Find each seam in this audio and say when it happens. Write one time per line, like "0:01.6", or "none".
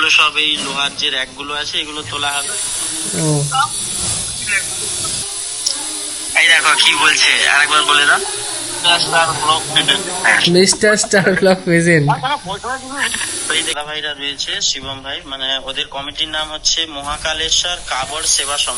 0:05.2
0:13.7